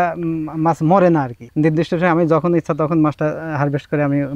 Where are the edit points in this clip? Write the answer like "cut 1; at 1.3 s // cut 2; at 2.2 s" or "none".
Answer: cut 1; at 1.4 s